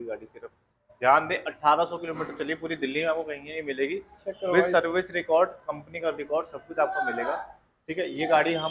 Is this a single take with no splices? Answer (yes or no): yes